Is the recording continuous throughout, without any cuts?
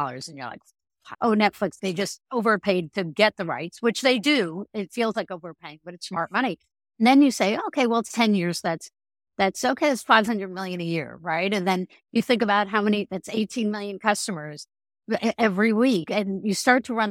no; 2 cuts; at 1.1 s, 1.8 s

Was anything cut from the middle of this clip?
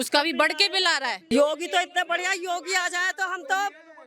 yes; 1 cut; at 1.2 s

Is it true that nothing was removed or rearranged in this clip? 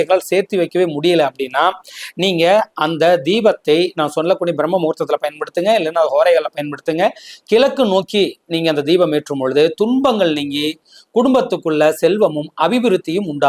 yes; 0 cuts

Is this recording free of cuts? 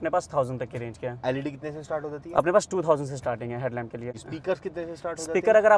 no; 1 cut; at 4.2 s

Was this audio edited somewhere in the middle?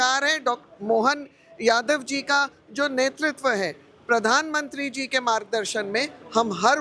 no; 0 cuts

